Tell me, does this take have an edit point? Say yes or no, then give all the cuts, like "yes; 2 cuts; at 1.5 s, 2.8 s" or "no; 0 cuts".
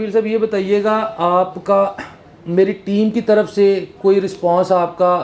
no; 0 cuts